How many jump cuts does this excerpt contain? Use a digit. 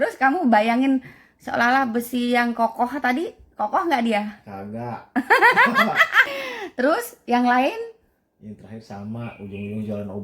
1